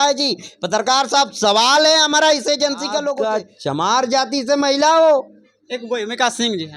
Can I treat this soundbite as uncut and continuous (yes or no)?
no